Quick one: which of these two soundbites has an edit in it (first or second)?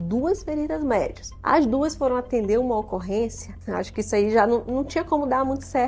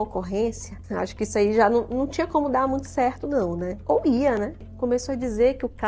second